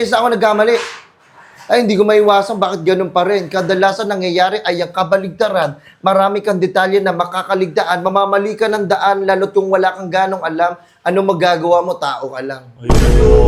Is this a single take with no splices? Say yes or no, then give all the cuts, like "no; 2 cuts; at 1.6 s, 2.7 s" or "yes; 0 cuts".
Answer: yes; 0 cuts